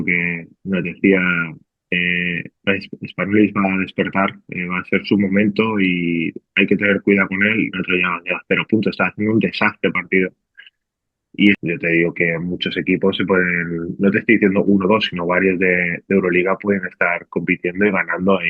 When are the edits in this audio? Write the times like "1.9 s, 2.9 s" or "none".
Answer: 11.6 s